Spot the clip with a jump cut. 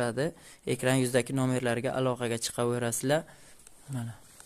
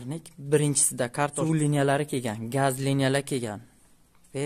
second; 1 cut; at 1.4 s

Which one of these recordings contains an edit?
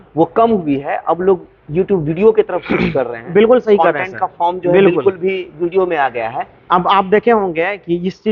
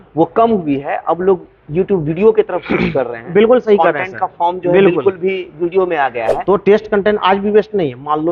second; 1 cut; at 6.4 s

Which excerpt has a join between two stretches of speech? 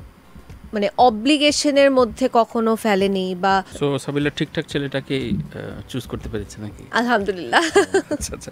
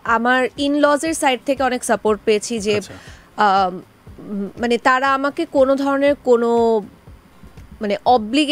first; 1 cut; at 3.7 s

